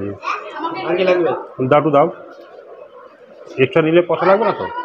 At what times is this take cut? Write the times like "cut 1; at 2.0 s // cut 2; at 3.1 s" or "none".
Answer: none